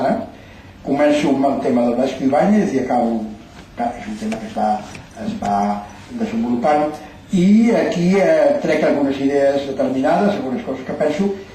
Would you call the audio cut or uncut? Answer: uncut